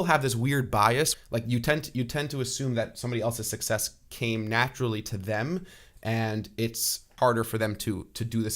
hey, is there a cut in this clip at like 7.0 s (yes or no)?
yes